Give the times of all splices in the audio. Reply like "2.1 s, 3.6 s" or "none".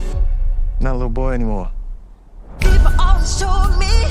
3.1 s